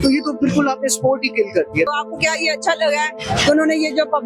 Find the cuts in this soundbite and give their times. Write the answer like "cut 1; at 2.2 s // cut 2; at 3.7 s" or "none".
cut 1; at 1.9 s